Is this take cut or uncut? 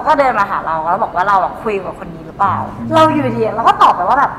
uncut